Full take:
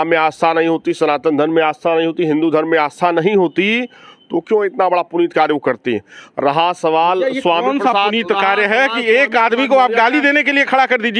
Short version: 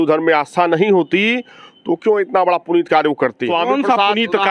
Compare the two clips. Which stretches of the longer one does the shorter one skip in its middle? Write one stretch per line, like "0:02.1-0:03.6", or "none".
0:05.9-0:07.4